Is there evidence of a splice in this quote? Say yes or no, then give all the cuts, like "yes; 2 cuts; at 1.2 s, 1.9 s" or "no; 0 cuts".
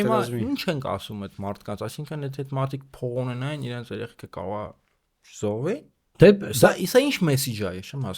no; 0 cuts